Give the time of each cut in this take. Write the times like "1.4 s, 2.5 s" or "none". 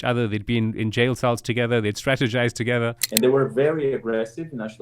3.0 s